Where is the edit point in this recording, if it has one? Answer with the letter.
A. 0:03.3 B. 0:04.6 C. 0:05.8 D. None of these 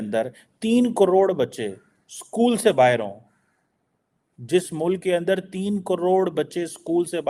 D